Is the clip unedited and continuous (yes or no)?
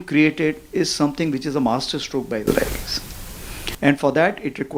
yes